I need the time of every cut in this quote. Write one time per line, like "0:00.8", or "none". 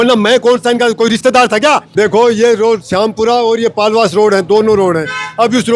0:01.9